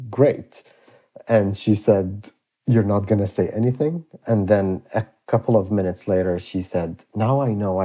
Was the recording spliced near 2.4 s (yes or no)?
no